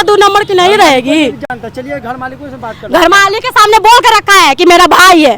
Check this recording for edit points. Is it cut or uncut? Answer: uncut